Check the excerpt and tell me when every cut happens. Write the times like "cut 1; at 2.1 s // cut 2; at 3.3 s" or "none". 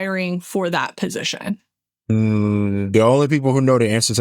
cut 1; at 2.1 s